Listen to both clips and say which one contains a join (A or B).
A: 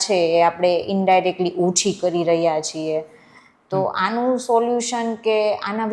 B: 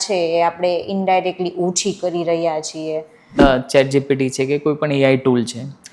B